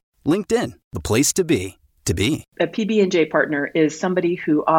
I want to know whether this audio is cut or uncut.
cut